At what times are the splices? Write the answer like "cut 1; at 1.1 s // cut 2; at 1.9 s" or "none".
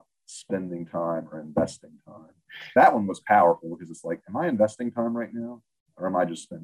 cut 1; at 2.5 s